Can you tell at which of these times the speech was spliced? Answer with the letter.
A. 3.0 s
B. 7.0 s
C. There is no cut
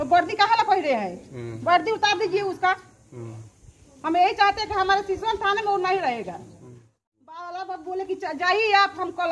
B